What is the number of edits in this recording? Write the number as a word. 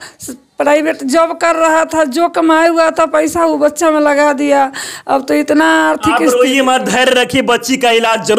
zero